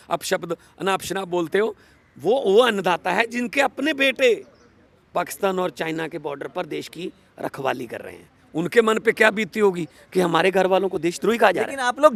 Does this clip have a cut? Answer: no; 0 cuts

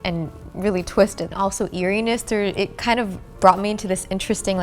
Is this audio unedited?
no; 1 cut; at 1.2 s

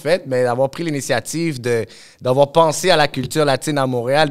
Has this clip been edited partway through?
no; 0 cuts

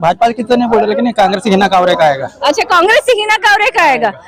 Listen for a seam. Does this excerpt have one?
no; 0 cuts

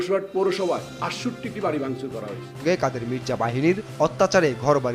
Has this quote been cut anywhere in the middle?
yes; 1 cut; at 2.5 s

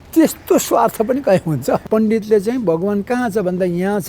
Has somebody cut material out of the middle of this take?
yes; 1 cut; at 1.8 s

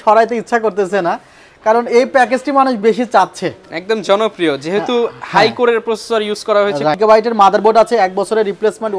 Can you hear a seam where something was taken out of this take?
yes; 1 cut; at 6.9 s

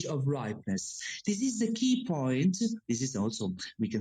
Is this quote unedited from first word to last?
yes; 0 cuts

